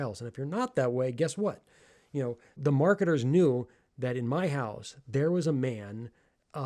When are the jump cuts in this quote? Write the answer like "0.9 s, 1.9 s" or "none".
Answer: 2.5 s